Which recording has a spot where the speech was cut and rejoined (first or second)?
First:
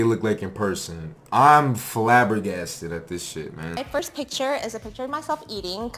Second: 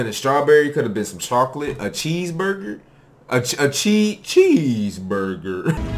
first